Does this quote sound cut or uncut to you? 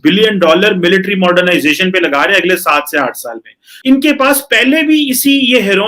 cut